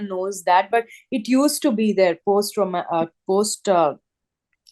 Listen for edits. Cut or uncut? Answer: uncut